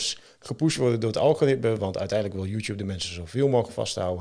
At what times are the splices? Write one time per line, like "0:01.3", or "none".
none

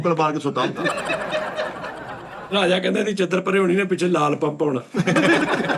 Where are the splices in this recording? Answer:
0:02.2

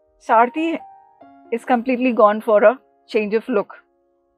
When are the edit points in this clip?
none

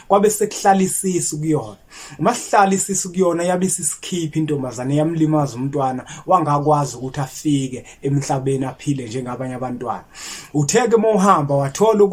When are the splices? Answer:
none

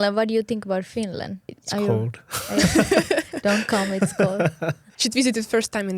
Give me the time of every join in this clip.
0:01.6
0:04.9

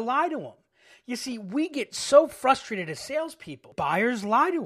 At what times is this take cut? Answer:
0:03.7

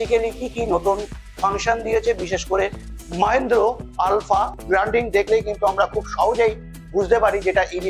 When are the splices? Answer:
0:04.6

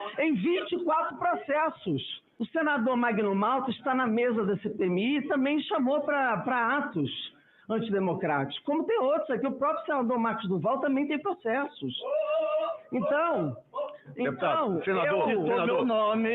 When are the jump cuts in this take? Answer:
0:02.2

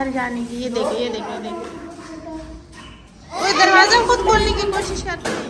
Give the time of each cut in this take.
0:01.6

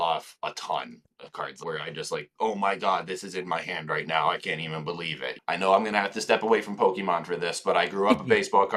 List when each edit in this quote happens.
0:01.6
0:05.3

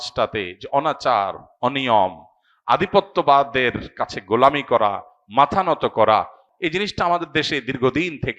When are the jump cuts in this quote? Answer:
0:06.4

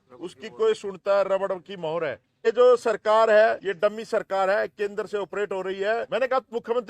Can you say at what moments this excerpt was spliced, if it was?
0:02.5
0:03.7
0:06.1

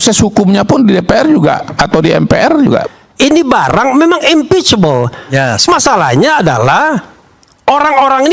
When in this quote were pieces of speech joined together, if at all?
0:03.0

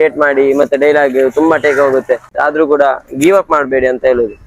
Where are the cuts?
0:02.3

